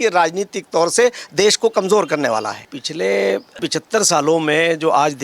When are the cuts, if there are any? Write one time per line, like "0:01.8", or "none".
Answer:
0:02.7